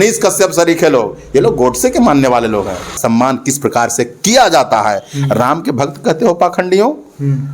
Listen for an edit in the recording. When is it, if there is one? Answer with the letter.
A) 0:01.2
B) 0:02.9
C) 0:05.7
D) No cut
B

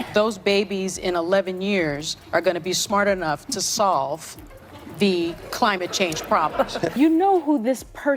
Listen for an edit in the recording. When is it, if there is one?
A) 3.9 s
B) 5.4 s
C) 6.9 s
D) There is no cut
C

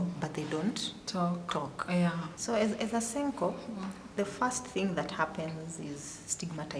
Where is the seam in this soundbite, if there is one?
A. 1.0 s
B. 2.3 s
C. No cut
B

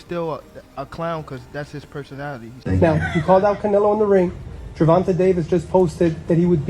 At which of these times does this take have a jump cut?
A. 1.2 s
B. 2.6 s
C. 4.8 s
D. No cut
B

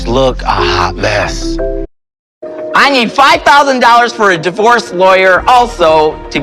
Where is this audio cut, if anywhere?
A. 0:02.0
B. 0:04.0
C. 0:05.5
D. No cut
A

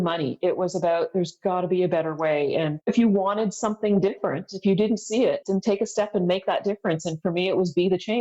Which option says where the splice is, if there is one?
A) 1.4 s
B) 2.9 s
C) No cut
B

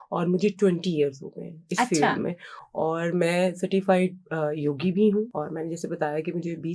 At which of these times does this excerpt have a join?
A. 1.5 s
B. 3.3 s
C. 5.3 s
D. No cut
C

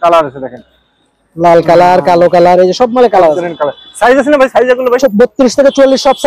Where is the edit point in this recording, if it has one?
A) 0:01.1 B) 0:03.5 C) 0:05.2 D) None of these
D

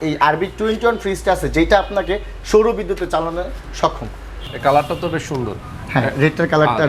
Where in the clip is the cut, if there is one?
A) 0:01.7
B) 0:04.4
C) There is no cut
B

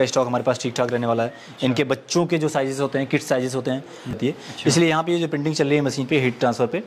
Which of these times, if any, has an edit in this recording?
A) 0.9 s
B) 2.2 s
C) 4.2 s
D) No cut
C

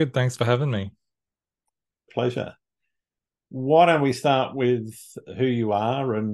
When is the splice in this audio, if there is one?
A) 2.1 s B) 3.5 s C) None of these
A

